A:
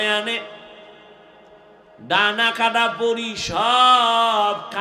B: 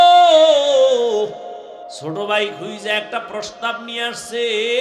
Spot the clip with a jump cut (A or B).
B